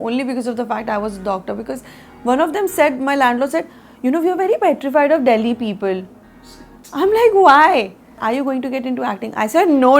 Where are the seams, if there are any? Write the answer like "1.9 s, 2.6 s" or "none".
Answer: 8.2 s